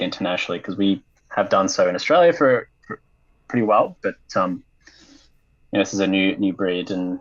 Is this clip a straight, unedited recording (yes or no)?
yes